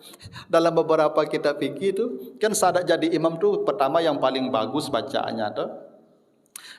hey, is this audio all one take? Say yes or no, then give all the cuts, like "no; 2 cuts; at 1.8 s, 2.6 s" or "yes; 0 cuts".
yes; 0 cuts